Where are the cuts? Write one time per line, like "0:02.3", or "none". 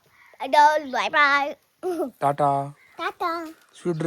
none